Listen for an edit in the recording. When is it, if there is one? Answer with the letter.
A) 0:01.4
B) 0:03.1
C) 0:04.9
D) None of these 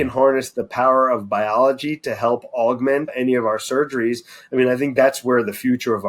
B